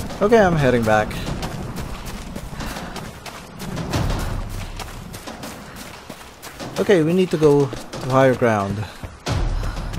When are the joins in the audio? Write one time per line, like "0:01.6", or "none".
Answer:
none